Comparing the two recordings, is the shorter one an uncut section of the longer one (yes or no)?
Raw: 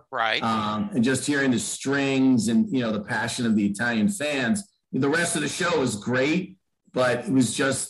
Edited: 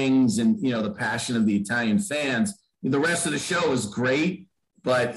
yes